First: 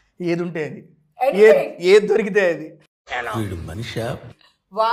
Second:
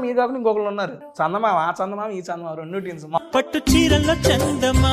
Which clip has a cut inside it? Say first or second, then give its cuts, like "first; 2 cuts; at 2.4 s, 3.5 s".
second; 2 cuts; at 1.0 s, 3.2 s